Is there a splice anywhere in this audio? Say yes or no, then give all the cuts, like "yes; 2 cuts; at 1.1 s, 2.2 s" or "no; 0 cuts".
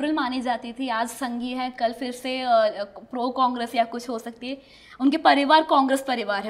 no; 0 cuts